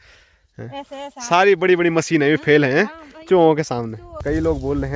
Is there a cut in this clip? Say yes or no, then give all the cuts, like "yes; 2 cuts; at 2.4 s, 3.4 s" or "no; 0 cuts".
yes; 1 cut; at 4.1 s